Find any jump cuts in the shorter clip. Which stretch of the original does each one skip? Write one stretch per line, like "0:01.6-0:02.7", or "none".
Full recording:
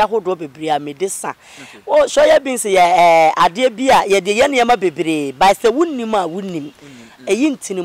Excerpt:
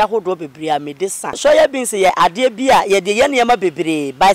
0:01.4-0:02.1
0:02.8-0:03.3